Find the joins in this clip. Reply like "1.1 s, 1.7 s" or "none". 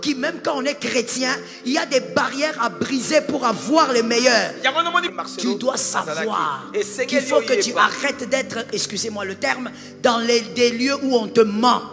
5.0 s